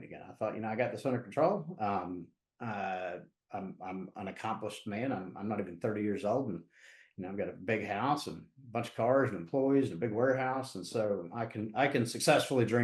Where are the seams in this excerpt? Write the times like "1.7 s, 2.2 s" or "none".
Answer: none